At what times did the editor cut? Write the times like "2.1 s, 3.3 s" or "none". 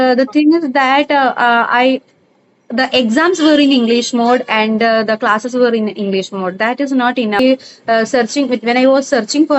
7.4 s

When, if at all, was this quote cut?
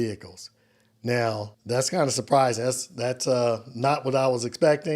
1.5 s

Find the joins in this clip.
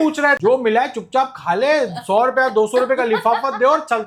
none

